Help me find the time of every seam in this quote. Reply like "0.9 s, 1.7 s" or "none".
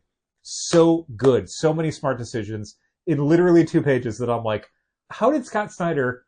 5.0 s